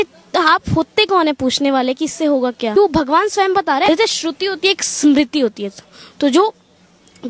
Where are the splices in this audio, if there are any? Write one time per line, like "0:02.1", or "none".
0:02.7
0:03.9